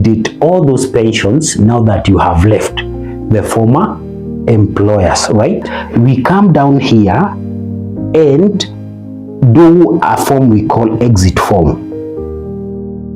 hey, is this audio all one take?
no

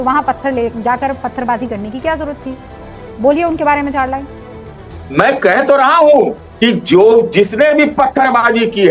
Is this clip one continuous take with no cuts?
yes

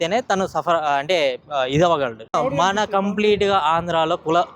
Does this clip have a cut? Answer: yes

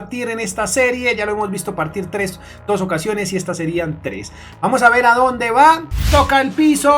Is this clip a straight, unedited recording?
no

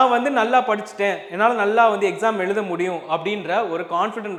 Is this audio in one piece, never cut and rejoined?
yes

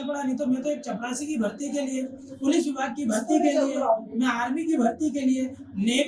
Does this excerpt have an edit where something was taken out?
no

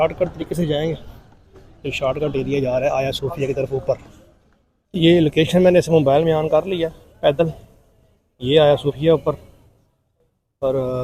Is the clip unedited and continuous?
yes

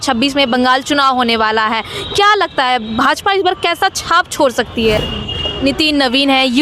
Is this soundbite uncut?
no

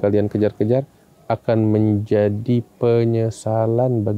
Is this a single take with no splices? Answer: yes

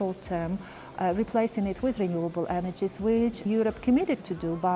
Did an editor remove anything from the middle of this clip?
yes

